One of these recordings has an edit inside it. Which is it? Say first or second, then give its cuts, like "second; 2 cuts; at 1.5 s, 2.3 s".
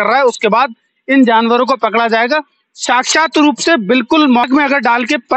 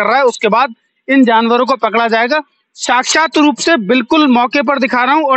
first; 1 cut; at 4.5 s